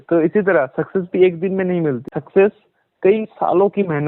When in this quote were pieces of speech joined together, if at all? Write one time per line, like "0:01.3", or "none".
0:02.1